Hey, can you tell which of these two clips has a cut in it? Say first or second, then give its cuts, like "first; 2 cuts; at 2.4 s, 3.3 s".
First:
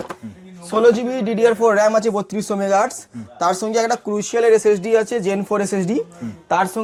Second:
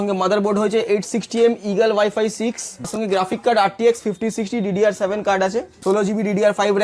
second; 2 cuts; at 3.0 s, 5.7 s